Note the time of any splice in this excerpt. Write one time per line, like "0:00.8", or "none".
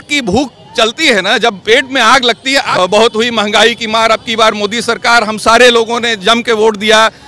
0:02.7